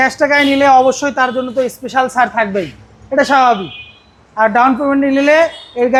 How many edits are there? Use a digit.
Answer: 0